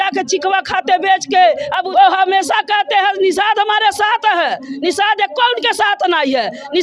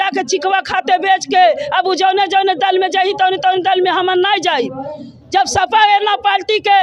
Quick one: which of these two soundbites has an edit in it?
first; 1 cut; at 1.8 s

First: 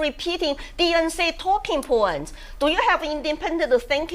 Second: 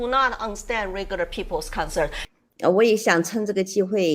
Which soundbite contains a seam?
second; 1 cut; at 2.2 s

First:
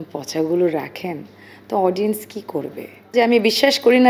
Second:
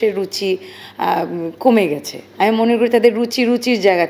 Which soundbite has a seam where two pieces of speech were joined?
first; 1 cut; at 3.1 s

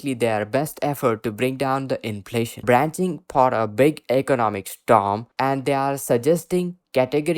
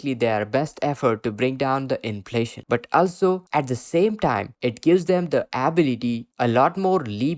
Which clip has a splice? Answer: first; 2 cuts; at 2.6 s, 5.3 s

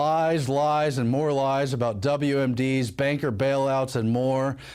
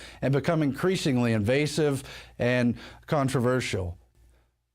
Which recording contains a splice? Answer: second; 1 cut; at 3.7 s

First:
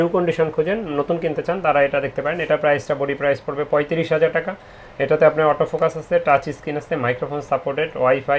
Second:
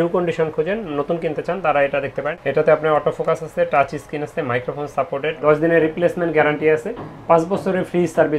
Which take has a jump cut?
second; 2 cuts; at 2.3 s, 5.4 s

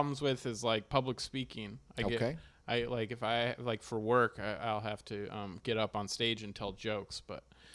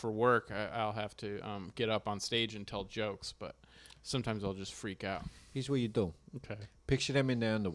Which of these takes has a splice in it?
second; 1 cut; at 5.3 s

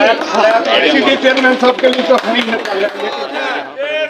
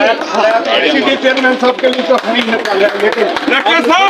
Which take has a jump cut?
first; 1 cut; at 3.0 s

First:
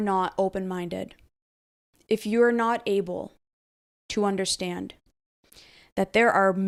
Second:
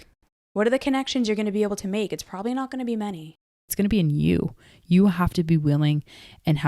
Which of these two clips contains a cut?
second; 1 cut; at 3.7 s

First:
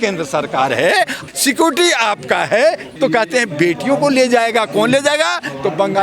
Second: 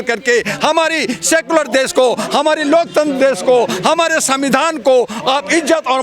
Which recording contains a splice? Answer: first; 2 cuts; at 1.3 s, 2.9 s

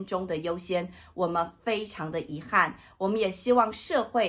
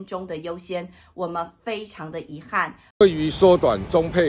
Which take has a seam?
second; 1 cut; at 2.9 s

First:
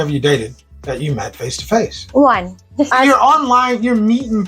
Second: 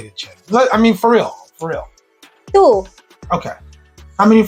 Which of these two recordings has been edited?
first; 1 cut; at 2.9 s

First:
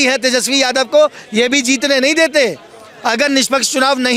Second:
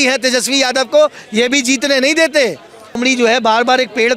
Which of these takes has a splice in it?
second; 1 cut; at 3.0 s

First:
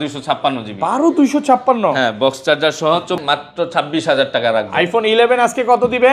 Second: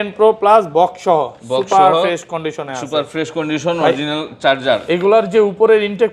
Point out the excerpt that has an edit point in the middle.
first; 1 cut; at 3.2 s

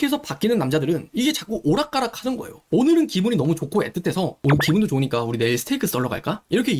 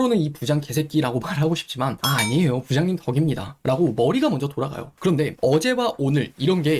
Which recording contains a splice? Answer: second; 1 cut; at 4.8 s

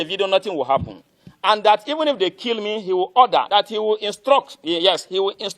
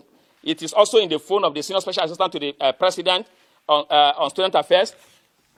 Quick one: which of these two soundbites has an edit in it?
first; 1 cut; at 3.5 s

